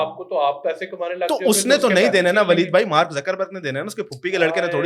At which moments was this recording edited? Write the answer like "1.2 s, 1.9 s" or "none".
none